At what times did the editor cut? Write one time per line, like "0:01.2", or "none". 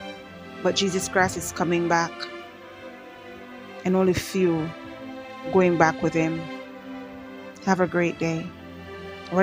none